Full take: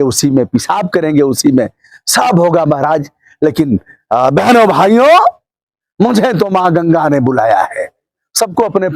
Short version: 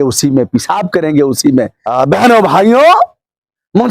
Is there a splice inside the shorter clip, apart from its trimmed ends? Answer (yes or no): yes